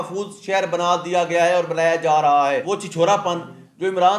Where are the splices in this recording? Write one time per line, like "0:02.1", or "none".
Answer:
0:02.6